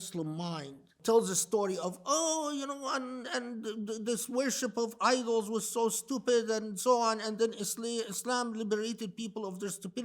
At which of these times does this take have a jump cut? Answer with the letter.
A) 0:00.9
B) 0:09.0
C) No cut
A